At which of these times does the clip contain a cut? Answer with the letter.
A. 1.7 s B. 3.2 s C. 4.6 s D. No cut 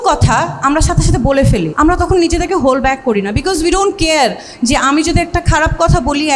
A